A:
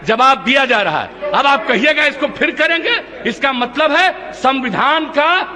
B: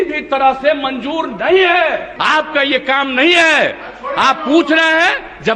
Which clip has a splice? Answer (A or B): B